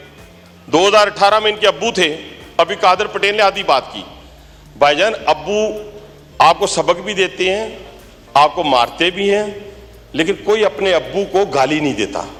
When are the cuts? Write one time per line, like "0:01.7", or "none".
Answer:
none